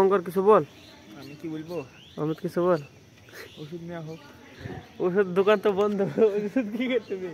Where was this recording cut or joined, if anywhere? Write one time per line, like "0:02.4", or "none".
none